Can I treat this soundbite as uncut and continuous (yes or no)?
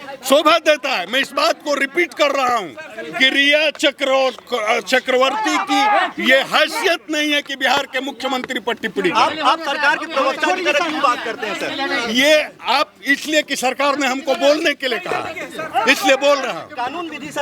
yes